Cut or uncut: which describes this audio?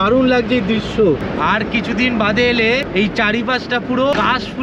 uncut